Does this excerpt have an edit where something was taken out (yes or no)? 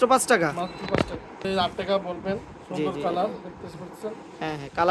yes